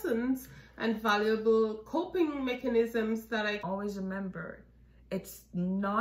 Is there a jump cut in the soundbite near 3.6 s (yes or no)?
yes